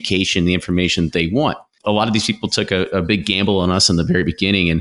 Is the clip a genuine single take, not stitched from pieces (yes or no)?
no